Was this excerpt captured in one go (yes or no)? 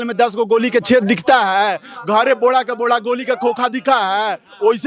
yes